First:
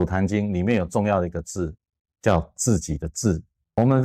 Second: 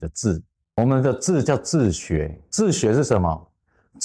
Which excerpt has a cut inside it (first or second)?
second